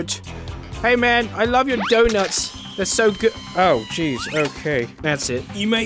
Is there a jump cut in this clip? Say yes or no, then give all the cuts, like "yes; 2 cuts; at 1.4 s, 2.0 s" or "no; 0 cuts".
yes; 1 cut; at 4.9 s